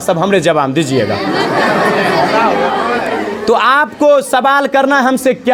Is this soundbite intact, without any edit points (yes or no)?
yes